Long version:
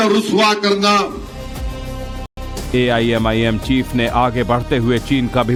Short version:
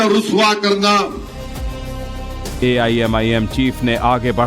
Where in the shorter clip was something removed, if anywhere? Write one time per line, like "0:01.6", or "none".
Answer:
0:02.3